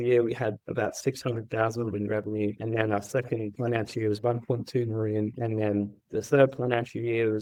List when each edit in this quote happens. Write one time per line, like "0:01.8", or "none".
none